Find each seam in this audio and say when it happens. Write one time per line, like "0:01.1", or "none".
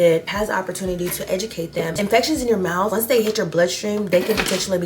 0:01.9